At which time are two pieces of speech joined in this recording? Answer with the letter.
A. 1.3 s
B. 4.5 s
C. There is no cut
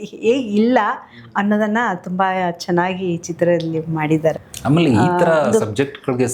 B